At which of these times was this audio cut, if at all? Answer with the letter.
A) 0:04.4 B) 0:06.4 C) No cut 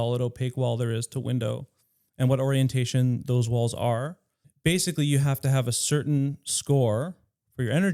A